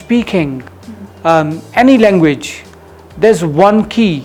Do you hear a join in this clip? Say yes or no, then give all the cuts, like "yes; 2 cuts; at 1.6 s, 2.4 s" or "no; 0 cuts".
no; 0 cuts